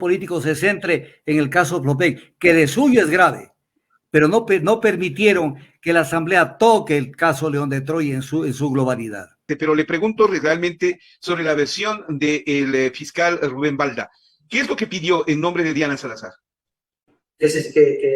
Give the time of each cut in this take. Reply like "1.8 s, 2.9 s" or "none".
9.5 s